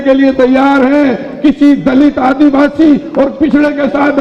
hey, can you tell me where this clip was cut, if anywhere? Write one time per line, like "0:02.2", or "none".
none